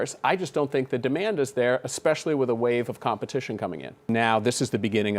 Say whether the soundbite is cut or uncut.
cut